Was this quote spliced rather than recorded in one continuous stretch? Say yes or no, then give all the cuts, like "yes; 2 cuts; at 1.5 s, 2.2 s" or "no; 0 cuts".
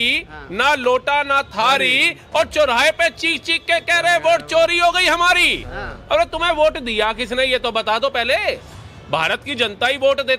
no; 0 cuts